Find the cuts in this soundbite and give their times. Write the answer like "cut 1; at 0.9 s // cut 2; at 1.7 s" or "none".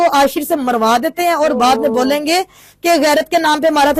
none